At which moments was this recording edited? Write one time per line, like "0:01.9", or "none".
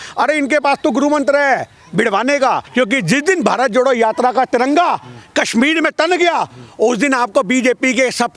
0:02.7